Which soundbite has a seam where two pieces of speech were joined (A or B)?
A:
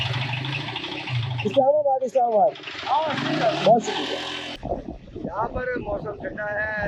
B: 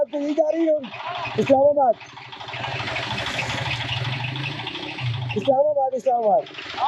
A